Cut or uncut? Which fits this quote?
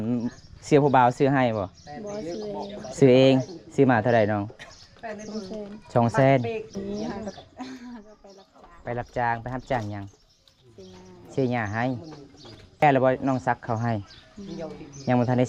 cut